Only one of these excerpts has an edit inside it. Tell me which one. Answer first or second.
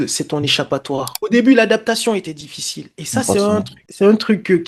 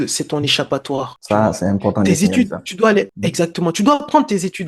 first